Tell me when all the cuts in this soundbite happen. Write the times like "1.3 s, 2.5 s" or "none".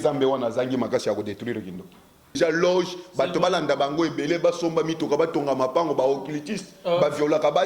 2.3 s